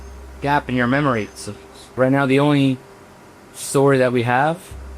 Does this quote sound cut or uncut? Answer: cut